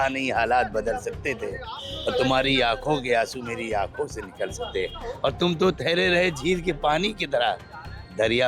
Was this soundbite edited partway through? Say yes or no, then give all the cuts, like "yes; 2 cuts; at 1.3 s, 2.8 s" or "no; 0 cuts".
no; 0 cuts